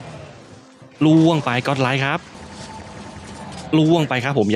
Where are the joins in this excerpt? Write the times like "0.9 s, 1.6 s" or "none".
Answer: 2.4 s